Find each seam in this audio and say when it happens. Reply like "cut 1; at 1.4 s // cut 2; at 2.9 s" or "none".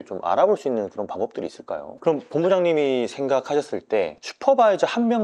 cut 1; at 1.9 s

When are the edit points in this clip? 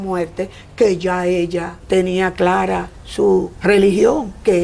cut 1; at 1.7 s // cut 2; at 3.5 s

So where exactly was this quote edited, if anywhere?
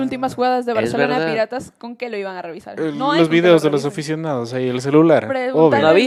none

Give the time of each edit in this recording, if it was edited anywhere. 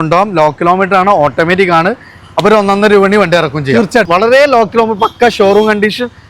cut 1; at 4.1 s

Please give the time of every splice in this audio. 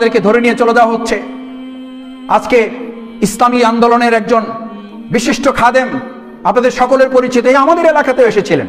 none

